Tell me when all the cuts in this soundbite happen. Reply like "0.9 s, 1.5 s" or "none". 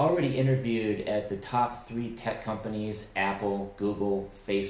none